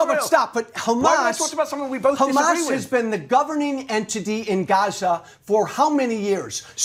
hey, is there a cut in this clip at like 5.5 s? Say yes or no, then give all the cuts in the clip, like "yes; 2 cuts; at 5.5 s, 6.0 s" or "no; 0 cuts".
no; 0 cuts